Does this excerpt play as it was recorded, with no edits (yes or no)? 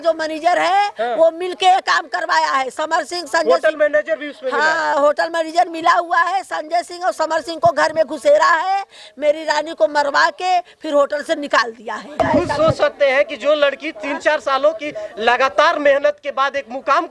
no